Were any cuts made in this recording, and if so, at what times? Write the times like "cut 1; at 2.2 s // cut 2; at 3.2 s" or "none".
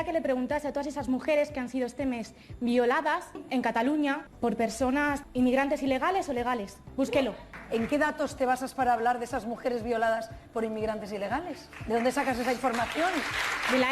cut 1; at 5.2 s // cut 2; at 6.8 s // cut 3; at 7.5 s